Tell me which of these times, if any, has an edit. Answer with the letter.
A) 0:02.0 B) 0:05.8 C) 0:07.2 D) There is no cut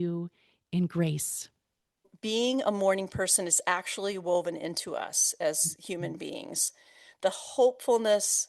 A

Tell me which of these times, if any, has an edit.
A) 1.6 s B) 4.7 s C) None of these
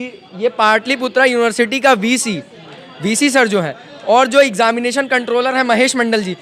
C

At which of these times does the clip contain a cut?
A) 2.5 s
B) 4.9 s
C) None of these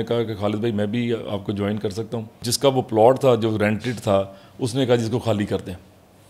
A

